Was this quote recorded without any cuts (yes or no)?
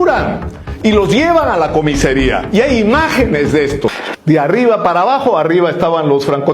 no